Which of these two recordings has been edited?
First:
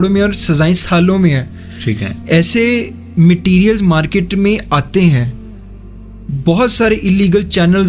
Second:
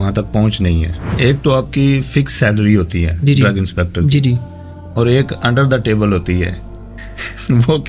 second; 1 cut; at 1.0 s

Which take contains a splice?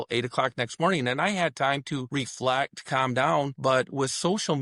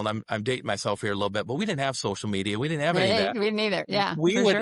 first; 2 cuts; at 2.1 s, 3.5 s

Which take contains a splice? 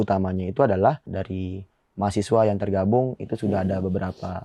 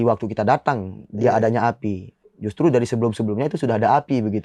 first; 1 cut; at 1.1 s

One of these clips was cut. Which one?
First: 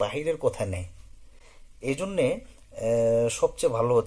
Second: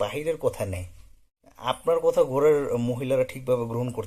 second; 1 cut; at 1.8 s

